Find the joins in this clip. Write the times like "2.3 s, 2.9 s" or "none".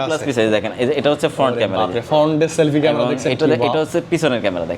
none